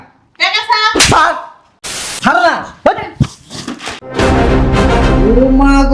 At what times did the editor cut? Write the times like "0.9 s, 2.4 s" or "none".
2.0 s